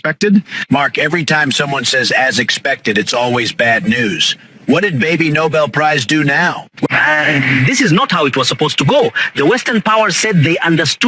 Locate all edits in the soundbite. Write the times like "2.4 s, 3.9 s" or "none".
6.9 s